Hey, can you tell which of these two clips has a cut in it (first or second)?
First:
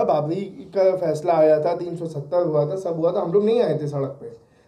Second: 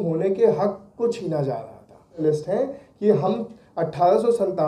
second